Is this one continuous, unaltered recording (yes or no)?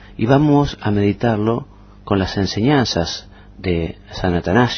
no